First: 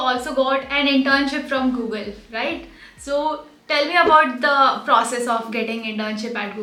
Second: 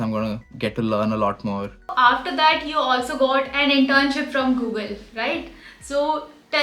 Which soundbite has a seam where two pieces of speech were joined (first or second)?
second